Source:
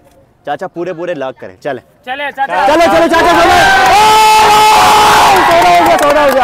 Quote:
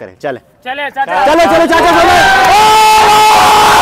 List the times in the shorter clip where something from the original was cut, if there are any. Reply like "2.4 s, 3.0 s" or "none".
none